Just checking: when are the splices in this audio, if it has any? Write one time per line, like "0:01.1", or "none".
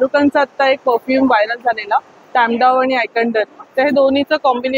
none